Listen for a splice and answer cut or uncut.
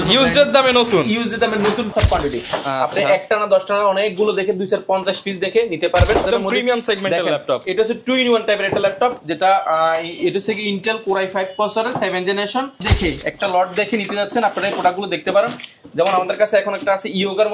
cut